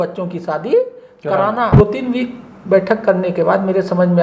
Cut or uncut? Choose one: cut